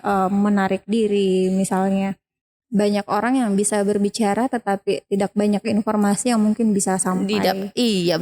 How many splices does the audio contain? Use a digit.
1